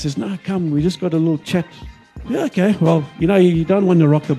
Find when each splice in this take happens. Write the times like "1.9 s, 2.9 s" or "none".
2.0 s

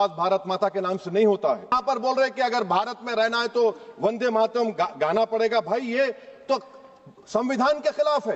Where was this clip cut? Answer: 1.7 s

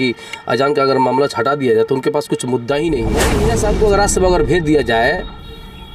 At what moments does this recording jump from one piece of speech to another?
3.3 s

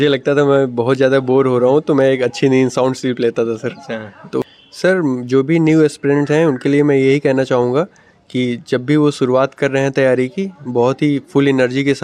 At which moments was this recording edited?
4.4 s

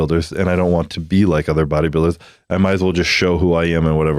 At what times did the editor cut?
none

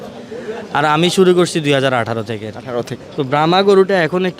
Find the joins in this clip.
3.0 s

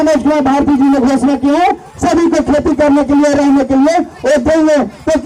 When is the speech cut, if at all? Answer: none

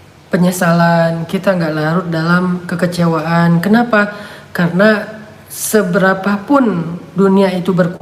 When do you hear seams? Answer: none

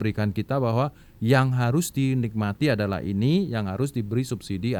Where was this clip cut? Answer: none

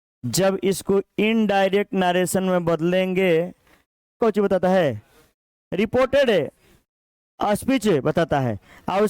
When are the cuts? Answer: 4.2 s

